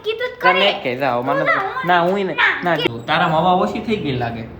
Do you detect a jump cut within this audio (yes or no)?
yes